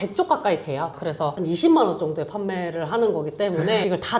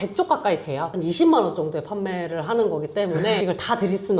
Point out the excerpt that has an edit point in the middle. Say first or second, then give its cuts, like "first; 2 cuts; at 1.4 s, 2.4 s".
second; 1 cut; at 0.9 s